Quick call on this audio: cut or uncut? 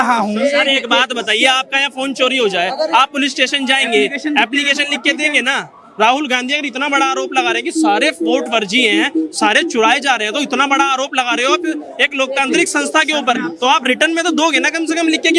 uncut